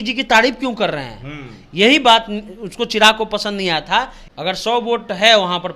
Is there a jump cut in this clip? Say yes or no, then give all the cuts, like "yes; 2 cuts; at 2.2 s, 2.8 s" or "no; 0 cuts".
yes; 1 cut; at 4.2 s